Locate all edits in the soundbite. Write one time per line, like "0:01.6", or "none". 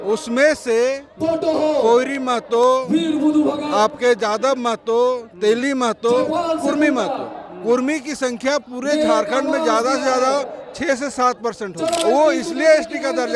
0:12.0